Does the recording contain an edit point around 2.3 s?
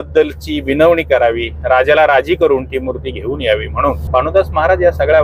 no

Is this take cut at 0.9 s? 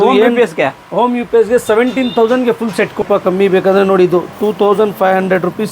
no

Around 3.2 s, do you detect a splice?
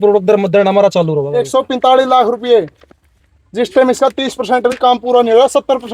no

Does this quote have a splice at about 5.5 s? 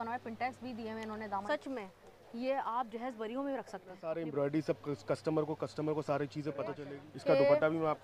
no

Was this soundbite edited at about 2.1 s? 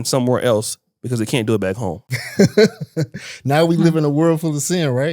yes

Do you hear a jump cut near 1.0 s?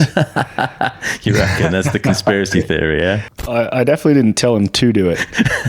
no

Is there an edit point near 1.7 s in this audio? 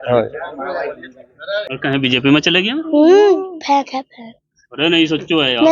yes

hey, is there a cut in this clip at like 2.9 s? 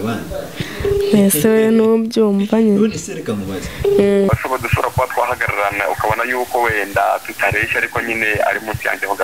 no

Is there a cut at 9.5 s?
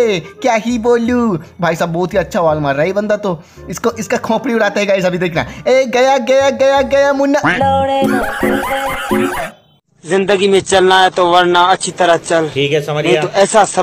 yes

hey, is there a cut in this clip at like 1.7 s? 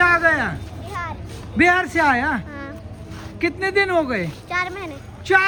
no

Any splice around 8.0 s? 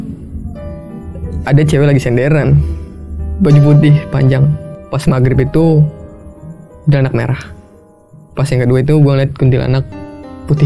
no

